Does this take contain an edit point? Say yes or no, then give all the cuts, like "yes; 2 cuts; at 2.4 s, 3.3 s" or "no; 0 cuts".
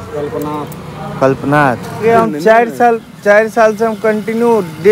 yes; 1 cut; at 2.0 s